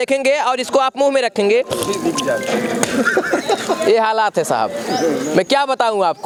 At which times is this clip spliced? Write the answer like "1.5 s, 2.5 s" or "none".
none